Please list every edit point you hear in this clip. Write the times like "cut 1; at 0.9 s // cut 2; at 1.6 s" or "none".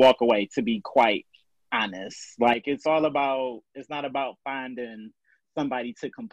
none